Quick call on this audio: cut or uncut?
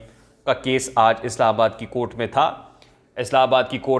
uncut